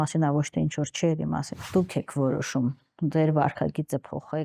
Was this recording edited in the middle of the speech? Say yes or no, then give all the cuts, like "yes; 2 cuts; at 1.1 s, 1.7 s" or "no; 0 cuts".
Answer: yes; 1 cut; at 1.5 s